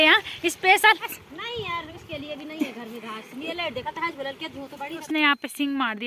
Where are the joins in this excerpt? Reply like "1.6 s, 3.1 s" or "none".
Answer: 1.1 s, 5.0 s